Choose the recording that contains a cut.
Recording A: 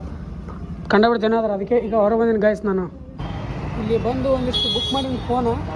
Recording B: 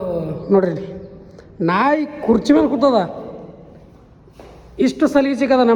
A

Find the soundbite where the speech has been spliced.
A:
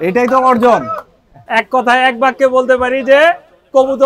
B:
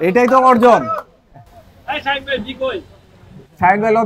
A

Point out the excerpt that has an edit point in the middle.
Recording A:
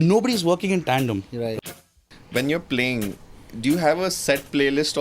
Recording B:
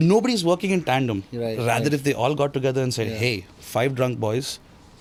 A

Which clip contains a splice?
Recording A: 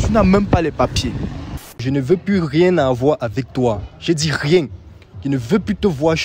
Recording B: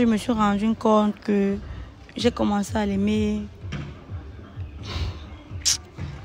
A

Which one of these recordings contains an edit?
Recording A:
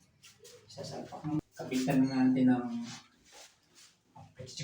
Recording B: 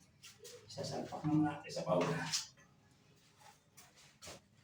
A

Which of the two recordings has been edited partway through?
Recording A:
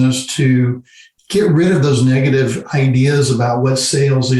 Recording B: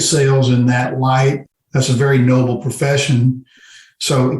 B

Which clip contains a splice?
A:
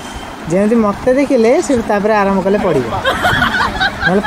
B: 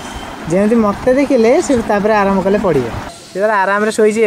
B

